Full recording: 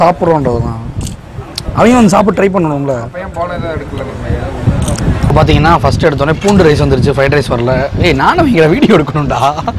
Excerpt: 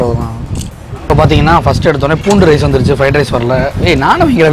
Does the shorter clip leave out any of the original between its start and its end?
yes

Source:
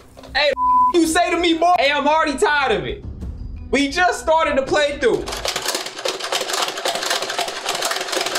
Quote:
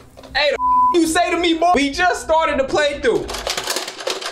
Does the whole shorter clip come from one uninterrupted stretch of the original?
no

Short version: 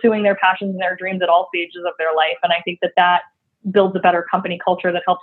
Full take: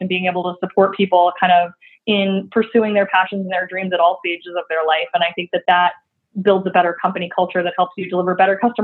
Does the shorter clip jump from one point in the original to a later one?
no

